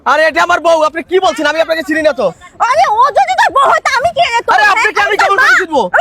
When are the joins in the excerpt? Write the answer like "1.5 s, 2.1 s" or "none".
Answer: none